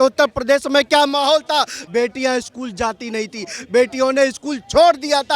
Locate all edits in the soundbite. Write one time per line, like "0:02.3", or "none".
0:01.8